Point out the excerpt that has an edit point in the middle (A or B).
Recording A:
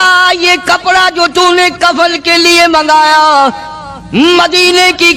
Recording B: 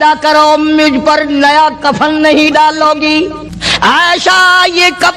B